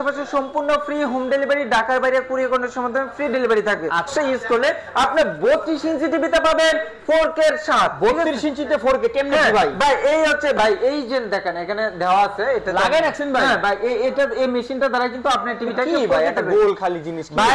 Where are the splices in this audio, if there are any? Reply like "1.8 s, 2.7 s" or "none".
4.1 s

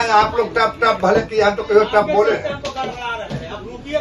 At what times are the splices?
none

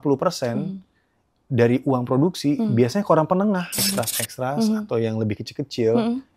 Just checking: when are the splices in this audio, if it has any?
3.7 s

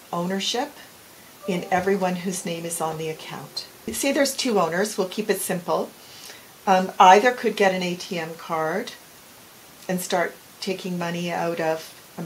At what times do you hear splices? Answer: 3.8 s

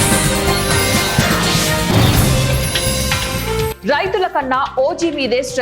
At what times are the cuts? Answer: 3.8 s

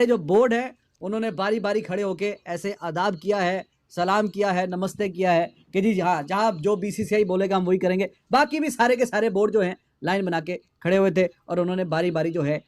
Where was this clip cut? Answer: none

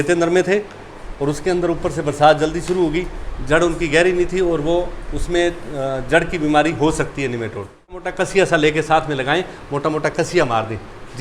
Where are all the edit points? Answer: 8.1 s

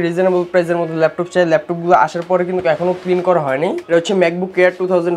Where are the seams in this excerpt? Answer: 3.8 s

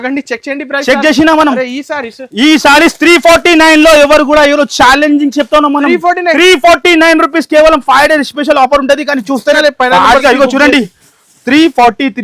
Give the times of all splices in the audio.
9.6 s

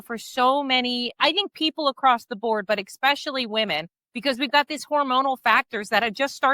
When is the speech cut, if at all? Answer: none

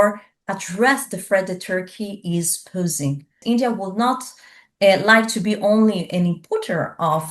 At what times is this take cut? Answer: 3.4 s

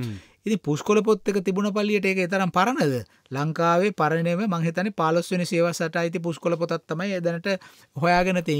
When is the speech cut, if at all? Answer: none

